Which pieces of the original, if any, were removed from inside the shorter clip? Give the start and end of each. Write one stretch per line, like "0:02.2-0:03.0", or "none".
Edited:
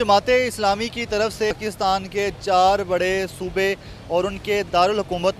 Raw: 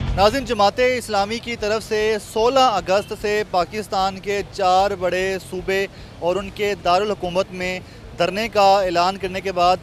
0:02.0-0:03.6